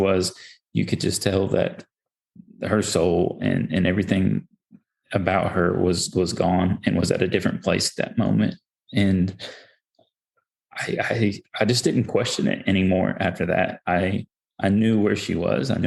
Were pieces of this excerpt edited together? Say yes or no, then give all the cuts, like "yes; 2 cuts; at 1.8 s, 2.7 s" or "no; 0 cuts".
no; 0 cuts